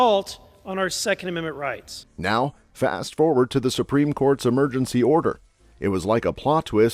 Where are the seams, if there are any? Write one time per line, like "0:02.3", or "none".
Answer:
none